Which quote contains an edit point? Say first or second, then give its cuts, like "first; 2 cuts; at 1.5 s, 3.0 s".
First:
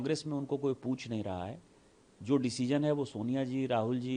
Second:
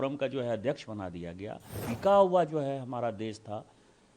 second; 1 cut; at 1.8 s